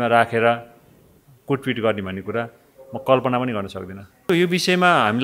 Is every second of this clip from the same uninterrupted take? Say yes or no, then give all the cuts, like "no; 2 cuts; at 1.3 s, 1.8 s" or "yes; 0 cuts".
no; 1 cut; at 4.3 s